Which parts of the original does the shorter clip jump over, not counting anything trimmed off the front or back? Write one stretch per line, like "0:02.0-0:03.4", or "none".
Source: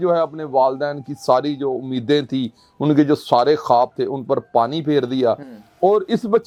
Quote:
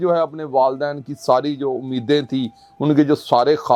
none